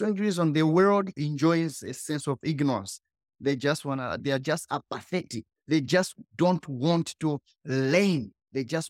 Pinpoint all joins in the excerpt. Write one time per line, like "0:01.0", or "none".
none